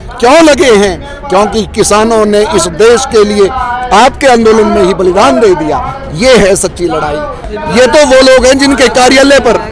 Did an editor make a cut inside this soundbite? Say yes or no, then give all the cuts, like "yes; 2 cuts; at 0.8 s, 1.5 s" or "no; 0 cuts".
yes; 1 cut; at 7.4 s